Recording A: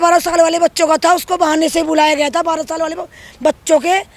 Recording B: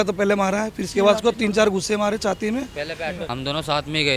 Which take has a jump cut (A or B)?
B